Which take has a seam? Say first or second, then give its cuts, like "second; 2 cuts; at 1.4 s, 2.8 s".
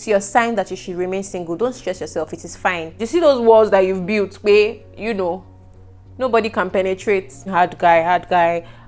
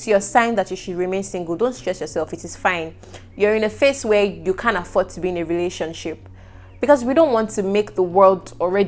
first; 2 cuts; at 3.0 s, 7.5 s